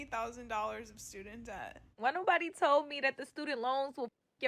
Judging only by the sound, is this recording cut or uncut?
cut